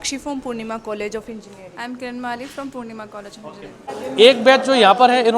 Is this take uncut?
no; 1 cut; at 4.0 s

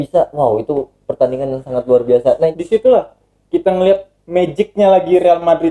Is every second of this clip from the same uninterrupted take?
no; 1 cut; at 2.5 s

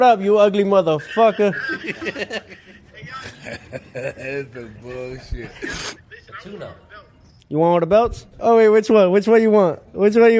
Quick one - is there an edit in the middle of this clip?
yes; 2 cuts; at 6.0 s, 8.4 s

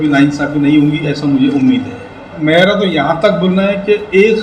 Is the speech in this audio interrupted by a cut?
yes; 1 cut; at 2.3 s

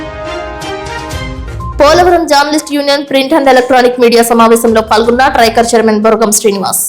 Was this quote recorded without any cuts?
no; 1 cut; at 1.3 s

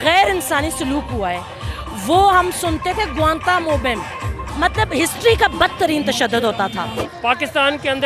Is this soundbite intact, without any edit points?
no; 2 cuts; at 4.4 s, 7.0 s

